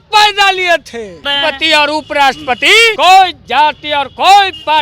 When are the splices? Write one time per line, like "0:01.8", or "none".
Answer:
0:01.3
0:02.9